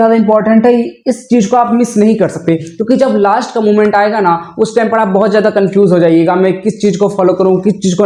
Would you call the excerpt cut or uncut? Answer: uncut